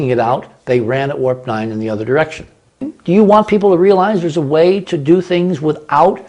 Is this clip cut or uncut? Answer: cut